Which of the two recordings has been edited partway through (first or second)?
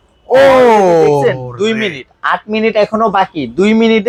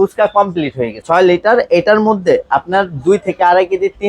second